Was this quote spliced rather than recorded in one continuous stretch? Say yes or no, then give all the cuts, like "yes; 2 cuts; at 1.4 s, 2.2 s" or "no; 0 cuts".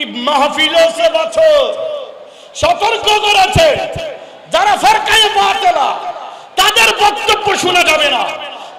no; 0 cuts